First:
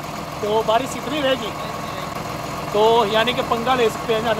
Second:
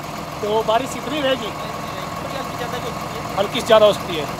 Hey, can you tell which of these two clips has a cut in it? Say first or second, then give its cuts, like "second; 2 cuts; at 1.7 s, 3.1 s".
first; 1 cut; at 2.2 s